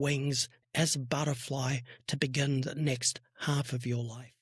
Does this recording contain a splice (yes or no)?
no